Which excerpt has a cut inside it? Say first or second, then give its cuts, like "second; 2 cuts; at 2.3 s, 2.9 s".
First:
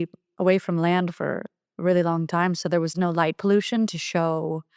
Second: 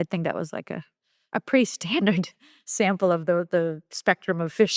first; 1 cut; at 2.9 s